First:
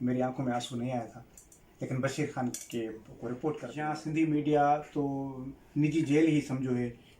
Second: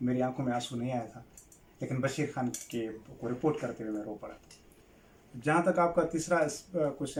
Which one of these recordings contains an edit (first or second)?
first